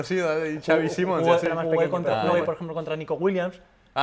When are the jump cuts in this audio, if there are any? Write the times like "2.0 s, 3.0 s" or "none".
2.0 s

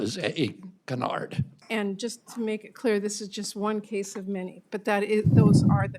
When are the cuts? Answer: 1.5 s

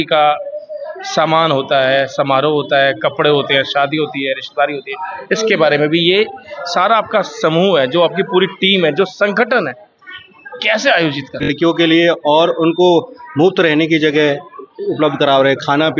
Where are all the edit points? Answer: 11.5 s

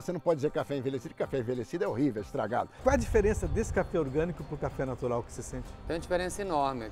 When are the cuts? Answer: 2.7 s

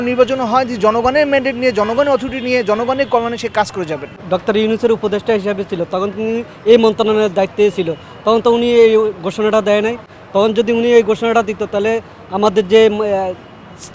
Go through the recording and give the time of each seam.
none

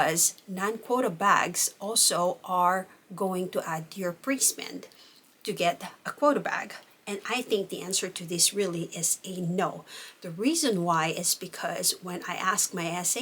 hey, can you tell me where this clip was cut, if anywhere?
none

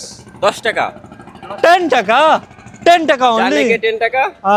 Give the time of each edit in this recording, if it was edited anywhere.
none

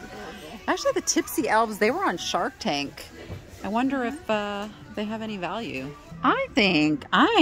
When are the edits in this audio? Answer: 6.1 s

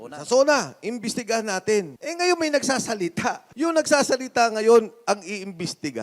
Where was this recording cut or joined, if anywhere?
2.0 s, 3.5 s

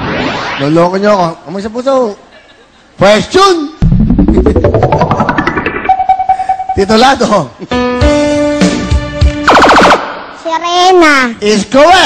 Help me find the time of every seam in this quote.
1.3 s

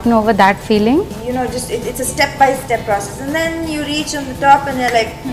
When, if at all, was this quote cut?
1.2 s

